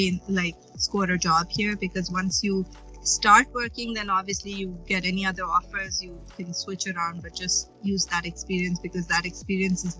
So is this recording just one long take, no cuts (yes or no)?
yes